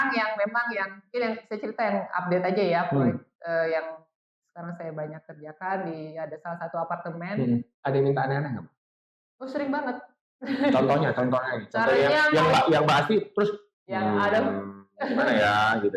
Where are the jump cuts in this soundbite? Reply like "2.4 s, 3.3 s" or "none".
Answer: 7.8 s